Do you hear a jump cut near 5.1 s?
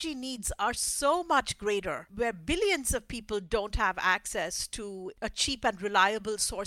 yes; 2 cuts; at 2.0 s, 5.1 s

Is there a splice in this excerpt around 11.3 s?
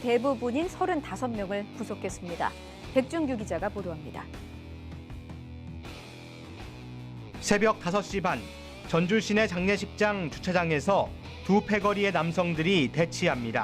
no; 1 cut; at 10.1 s

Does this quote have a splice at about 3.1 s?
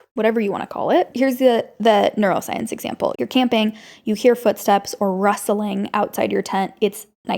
yes; 2 cuts; at 1.1 s, 3.1 s

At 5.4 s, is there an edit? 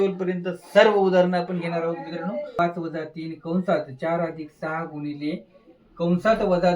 no; 1 cut; at 2.5 s

